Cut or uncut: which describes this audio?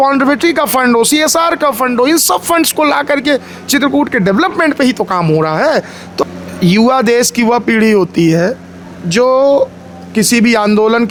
uncut